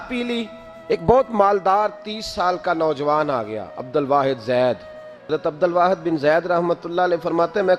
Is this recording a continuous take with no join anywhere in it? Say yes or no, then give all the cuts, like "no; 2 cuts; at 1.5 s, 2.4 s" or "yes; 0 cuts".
no; 2 cuts; at 1.0 s, 5.3 s